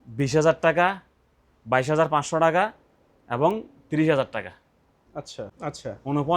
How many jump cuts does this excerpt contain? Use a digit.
1